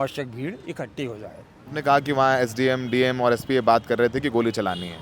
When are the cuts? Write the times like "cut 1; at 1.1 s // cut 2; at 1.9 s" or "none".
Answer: cut 1; at 1.7 s